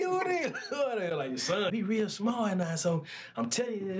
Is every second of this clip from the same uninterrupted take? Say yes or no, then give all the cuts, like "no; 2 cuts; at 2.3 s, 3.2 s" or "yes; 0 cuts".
no; 1 cut; at 1.7 s